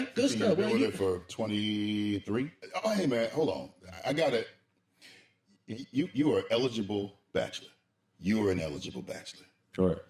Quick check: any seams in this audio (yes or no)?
yes